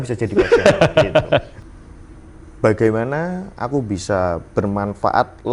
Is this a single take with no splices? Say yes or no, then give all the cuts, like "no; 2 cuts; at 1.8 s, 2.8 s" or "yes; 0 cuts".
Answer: no; 1 cut; at 1.5 s